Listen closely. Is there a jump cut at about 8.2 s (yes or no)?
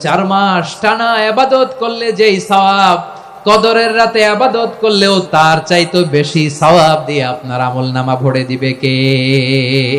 no